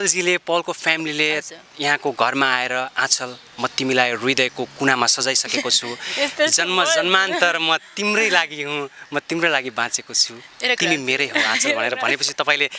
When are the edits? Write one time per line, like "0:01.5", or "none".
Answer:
none